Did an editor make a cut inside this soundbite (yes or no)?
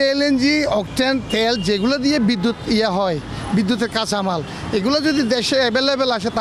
no